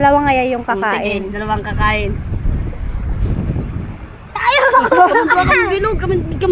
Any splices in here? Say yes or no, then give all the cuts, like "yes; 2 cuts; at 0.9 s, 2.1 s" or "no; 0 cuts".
no; 0 cuts